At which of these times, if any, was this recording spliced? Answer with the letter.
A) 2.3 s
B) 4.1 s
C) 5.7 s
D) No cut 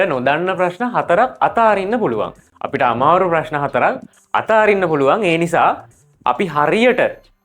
D